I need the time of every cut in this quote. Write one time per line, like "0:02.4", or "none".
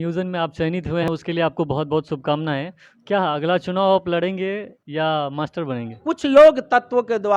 0:01.1
0:06.1

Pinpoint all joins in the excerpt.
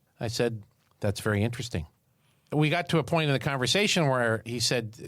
0:02.0

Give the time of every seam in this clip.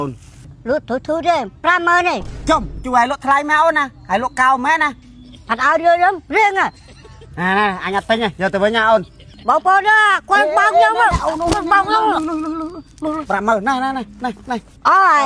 0:13.2

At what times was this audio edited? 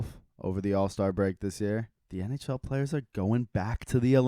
0:02.0

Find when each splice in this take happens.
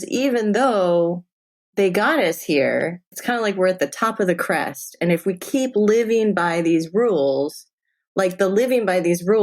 0:03.1

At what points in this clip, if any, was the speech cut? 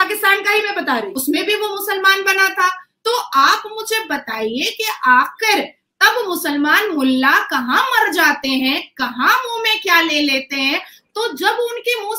0:01.1

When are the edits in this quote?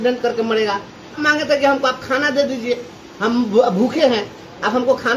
0:01.2

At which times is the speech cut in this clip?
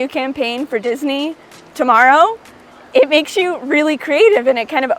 none

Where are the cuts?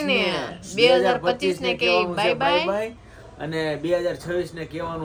none

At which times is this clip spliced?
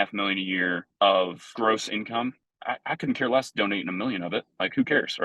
0:00.8
0:01.5
0:02.5

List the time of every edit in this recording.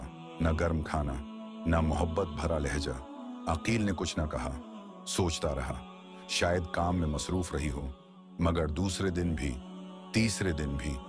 none

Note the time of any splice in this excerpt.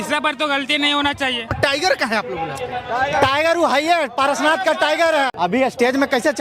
0:01.5
0:05.3

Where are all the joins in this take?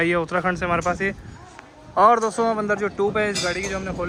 none

